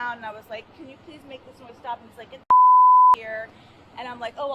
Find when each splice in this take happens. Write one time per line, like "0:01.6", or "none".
none